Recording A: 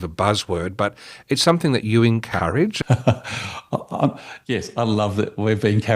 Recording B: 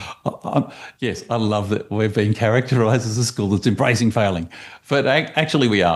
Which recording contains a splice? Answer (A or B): A